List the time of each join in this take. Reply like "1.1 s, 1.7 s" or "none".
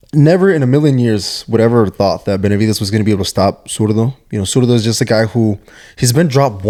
none